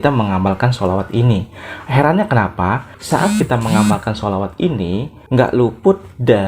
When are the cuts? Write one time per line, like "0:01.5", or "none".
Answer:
0:02.9